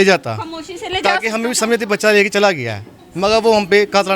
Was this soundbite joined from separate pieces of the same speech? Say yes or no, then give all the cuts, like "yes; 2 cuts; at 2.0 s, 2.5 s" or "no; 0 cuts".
no; 0 cuts